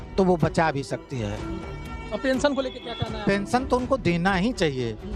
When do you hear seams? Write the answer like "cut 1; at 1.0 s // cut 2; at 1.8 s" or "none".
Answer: none

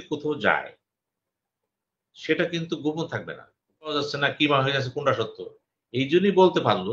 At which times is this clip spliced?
cut 1; at 3.9 s

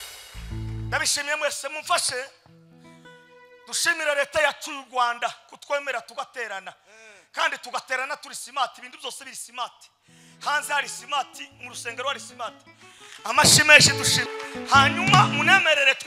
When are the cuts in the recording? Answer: cut 1; at 14.3 s

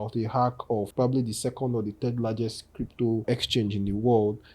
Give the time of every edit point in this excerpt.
cut 1; at 0.9 s // cut 2; at 3.2 s

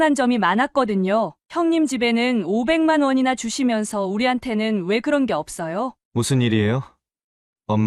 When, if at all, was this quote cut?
cut 1; at 6.0 s

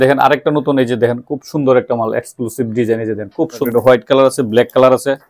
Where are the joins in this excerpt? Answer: cut 1; at 3.6 s

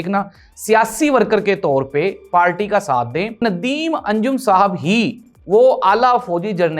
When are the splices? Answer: cut 1; at 3.4 s

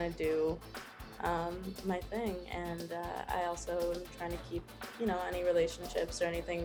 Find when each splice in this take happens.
none

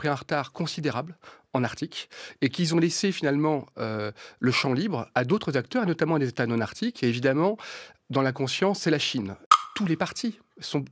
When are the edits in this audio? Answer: cut 1; at 9.5 s

